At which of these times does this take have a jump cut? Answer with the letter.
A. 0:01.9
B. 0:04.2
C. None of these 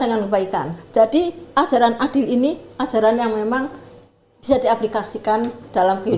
C